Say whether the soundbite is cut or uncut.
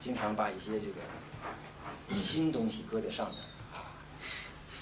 uncut